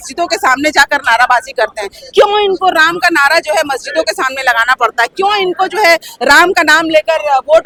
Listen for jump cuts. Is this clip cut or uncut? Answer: uncut